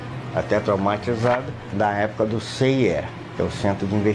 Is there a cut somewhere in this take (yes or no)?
yes